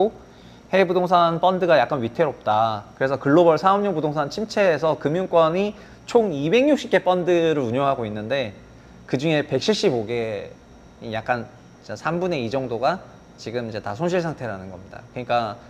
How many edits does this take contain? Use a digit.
0